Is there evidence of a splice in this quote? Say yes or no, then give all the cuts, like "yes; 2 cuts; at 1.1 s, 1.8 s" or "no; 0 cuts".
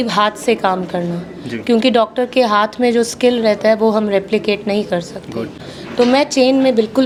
no; 0 cuts